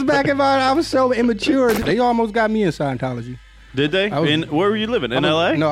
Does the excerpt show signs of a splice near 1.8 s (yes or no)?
yes